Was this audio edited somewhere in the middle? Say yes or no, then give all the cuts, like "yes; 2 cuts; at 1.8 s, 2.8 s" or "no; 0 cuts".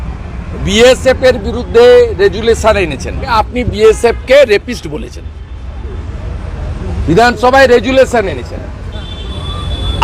yes; 1 cut; at 3.3 s